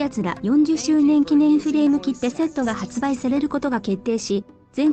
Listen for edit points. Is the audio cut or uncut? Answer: cut